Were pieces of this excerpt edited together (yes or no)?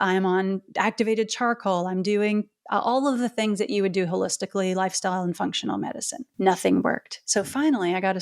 yes